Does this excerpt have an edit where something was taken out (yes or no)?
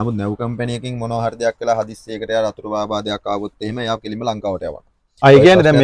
no